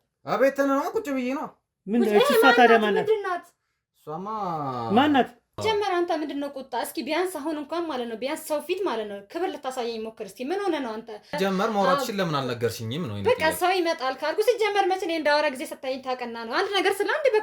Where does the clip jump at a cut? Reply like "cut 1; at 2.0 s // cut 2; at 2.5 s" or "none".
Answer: cut 1; at 5.6 s // cut 2; at 11.3 s